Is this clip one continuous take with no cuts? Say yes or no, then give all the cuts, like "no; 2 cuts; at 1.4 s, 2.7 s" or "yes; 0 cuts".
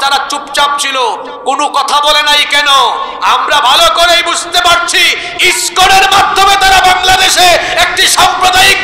yes; 0 cuts